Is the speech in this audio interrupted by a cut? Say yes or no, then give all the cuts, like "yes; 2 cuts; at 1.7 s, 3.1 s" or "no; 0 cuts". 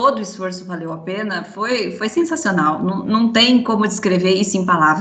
no; 0 cuts